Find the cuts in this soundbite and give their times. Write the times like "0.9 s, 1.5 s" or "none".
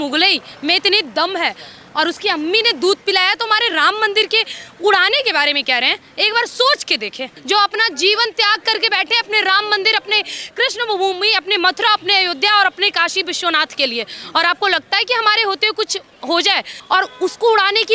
7.3 s, 16.7 s